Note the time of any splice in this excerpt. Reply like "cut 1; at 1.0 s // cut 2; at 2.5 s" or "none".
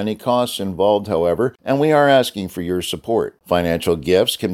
cut 1; at 1.6 s